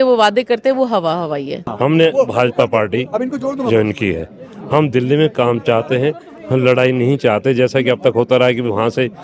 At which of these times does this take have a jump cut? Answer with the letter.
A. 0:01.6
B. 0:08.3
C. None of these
A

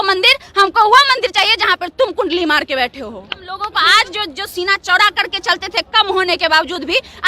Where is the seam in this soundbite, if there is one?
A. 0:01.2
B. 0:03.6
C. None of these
B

